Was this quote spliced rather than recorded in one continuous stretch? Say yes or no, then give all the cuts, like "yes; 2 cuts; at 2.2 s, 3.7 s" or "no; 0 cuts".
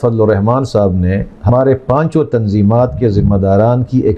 yes; 1 cut; at 1.5 s